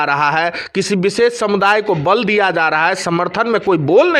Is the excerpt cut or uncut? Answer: uncut